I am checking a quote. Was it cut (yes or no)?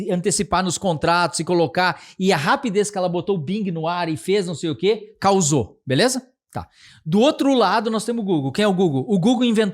no